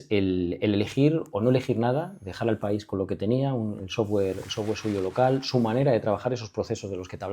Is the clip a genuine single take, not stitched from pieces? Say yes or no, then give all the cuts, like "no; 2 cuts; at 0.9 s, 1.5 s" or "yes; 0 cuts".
yes; 0 cuts